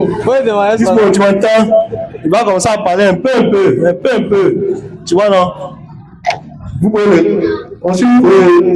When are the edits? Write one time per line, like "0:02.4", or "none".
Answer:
none